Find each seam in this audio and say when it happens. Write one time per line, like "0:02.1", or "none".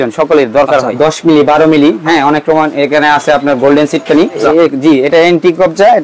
0:00.9
0:04.4